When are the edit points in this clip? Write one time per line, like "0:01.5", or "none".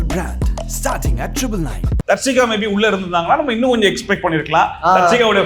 0:02.0